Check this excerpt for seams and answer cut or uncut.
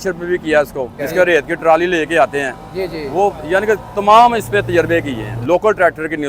cut